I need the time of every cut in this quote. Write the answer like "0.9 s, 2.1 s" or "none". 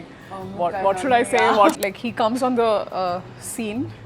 1.7 s